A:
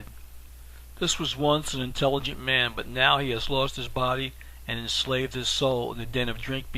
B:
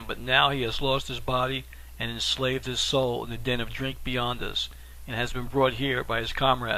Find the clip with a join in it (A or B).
A